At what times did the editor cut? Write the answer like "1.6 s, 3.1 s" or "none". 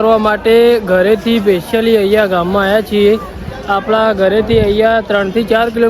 none